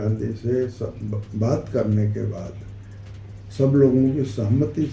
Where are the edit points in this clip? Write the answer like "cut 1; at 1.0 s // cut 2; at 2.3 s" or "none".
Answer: none